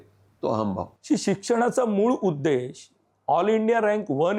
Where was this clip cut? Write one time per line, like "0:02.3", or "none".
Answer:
0:01.0